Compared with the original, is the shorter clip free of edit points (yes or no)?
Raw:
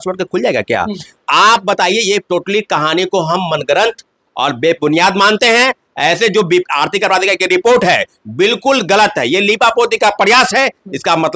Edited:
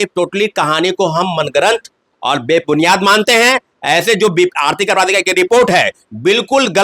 yes